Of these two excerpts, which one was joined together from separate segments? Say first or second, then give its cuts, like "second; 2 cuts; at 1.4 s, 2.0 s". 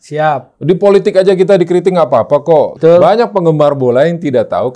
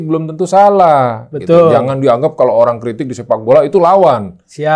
first; 1 cut; at 2.7 s